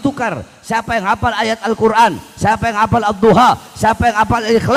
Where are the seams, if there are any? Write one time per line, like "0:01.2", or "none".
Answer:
none